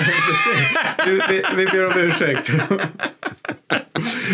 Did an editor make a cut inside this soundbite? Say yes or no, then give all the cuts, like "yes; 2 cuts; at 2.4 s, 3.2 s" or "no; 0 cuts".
no; 0 cuts